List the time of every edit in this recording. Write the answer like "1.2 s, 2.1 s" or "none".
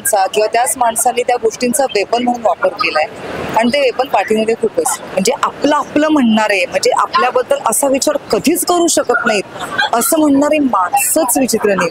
5.1 s